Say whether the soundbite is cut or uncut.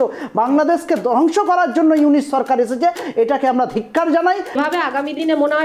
cut